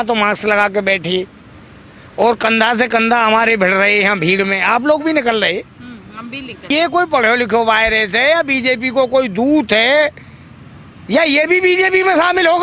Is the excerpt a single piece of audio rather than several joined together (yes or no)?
no